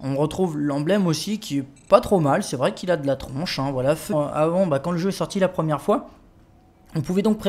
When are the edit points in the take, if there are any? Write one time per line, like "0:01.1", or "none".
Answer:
none